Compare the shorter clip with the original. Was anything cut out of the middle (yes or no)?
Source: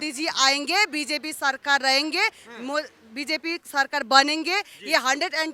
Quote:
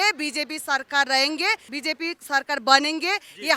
yes